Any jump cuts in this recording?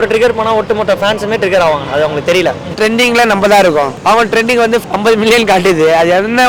yes; 3 cuts; at 2.8 s, 3.9 s, 4.9 s

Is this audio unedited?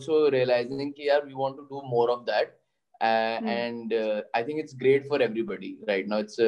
yes; 0 cuts

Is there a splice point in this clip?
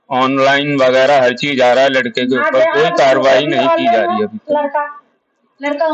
no; 0 cuts

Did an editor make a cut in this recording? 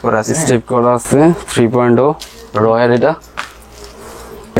no; 0 cuts

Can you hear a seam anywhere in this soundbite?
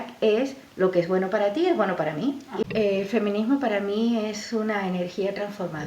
yes; 1 cut; at 2.6 s

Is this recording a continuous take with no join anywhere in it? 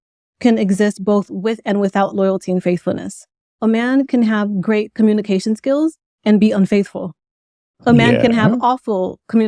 no; 1 cut; at 3.6 s

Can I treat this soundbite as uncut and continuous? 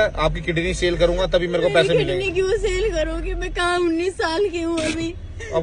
yes; 0 cuts

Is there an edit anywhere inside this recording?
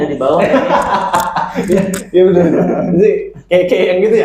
no; 0 cuts

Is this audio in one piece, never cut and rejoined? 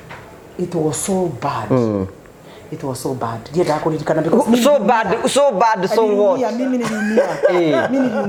yes; 0 cuts

